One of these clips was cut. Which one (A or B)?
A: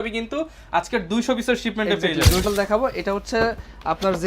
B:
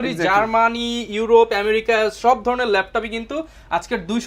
A